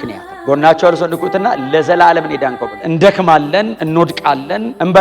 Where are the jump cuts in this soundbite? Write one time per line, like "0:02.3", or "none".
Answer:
0:02.8